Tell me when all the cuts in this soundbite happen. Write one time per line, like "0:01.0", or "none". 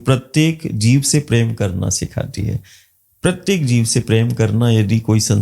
none